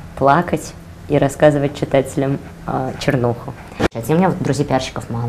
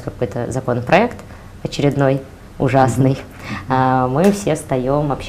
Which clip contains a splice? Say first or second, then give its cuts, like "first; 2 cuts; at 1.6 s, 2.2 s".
first; 1 cut; at 3.9 s